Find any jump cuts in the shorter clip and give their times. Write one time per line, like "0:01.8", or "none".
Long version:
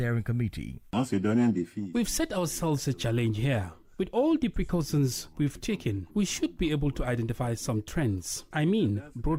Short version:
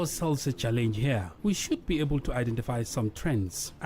0:01.3